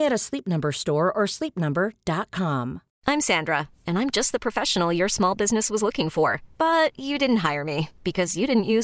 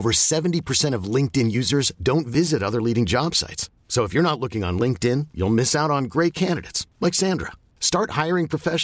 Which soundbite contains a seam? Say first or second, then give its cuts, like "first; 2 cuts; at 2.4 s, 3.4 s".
first; 1 cut; at 2.9 s